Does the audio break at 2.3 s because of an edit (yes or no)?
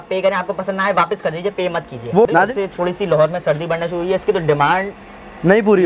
yes